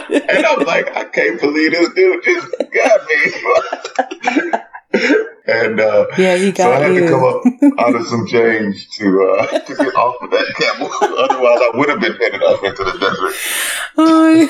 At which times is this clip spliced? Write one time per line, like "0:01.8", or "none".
0:05.3